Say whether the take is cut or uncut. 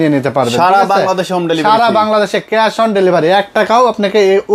uncut